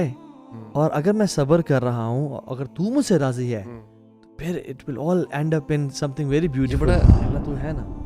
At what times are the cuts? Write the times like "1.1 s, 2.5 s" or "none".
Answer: 7.2 s